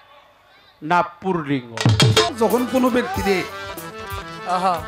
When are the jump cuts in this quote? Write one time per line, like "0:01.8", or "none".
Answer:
0:02.3

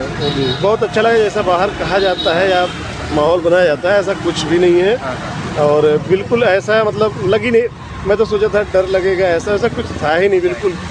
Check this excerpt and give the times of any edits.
none

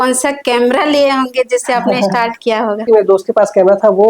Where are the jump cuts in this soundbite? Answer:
0:02.8

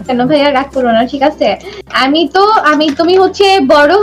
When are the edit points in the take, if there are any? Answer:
none

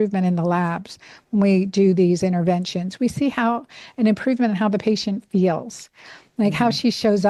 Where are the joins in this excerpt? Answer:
none

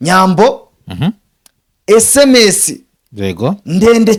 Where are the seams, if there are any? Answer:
none

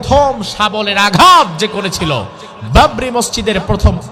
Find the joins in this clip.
none

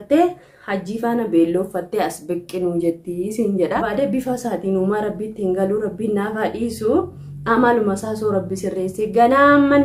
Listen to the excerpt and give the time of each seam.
none

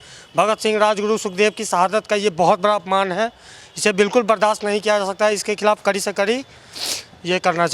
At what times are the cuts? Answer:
none

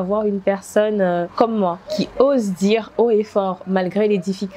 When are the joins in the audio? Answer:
0:01.3

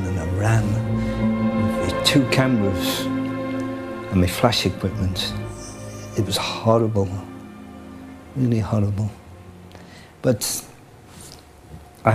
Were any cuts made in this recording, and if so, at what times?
none

